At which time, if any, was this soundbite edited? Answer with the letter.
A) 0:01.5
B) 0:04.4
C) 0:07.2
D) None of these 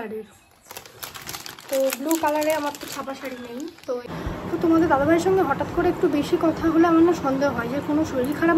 B